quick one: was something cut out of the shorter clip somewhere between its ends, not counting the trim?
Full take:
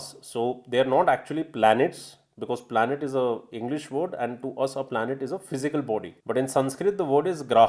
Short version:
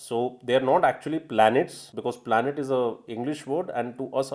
yes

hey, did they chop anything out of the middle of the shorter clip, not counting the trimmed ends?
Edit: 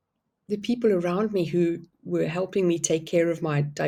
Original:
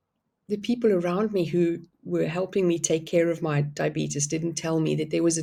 no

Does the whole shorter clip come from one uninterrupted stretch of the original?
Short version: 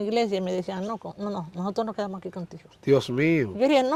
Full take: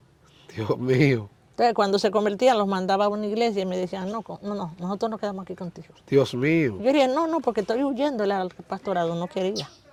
yes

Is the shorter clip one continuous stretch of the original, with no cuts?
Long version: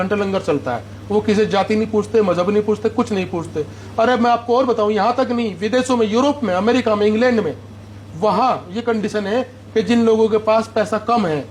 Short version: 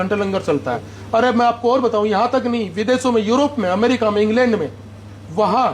no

